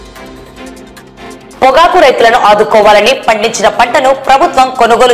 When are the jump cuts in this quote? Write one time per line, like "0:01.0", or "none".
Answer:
0:01.3

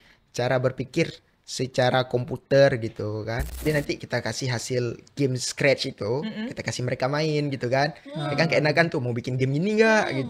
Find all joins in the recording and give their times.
0:03.6

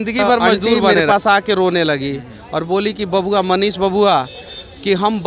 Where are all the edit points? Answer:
0:00.9

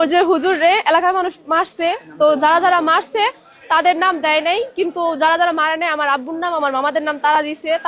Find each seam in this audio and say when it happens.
none

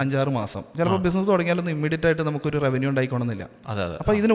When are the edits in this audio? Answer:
none

